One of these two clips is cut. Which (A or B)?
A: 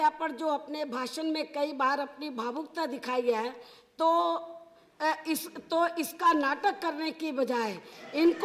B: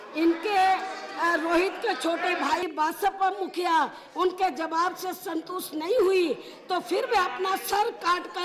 B